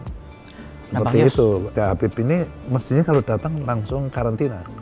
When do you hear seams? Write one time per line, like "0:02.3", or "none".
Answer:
0:01.7